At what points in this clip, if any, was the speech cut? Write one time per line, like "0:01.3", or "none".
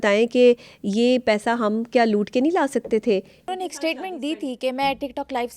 0:03.5